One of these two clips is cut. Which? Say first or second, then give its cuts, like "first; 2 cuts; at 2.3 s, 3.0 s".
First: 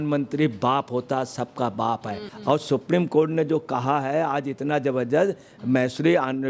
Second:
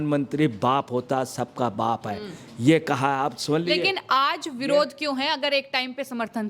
first; 1 cut; at 2.3 s